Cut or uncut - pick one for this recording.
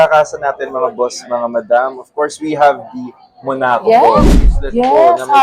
cut